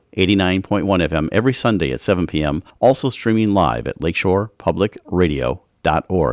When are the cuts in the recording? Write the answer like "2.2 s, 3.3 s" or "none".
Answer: 2.6 s